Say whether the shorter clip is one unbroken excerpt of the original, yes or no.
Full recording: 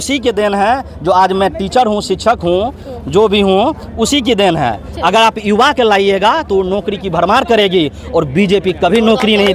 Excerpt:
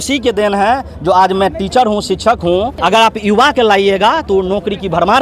no